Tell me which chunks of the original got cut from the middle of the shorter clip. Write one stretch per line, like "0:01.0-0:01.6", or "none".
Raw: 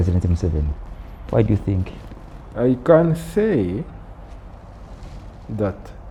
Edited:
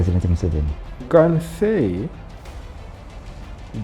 0:01.1-0:02.8